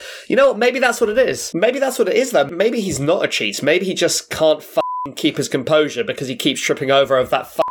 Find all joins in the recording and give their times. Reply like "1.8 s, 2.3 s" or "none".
1.4 s, 2.5 s